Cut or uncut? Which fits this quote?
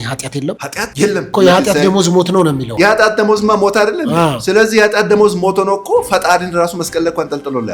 cut